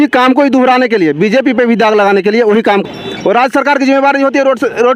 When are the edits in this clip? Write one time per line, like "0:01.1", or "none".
0:02.8